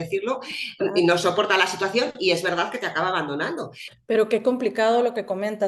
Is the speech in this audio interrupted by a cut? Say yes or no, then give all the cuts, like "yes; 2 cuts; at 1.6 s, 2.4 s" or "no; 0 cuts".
yes; 1 cut; at 3.8 s